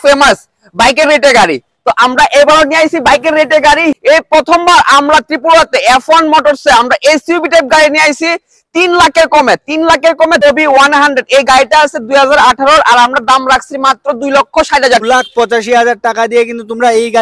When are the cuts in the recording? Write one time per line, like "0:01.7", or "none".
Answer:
0:04.0
0:10.4
0:15.0